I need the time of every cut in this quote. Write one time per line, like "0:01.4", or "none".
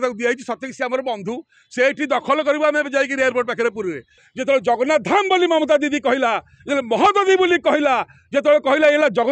0:04.2